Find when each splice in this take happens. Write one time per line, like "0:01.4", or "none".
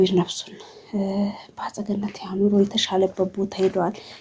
none